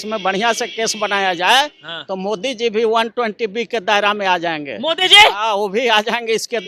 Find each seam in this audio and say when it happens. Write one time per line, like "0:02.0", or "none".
none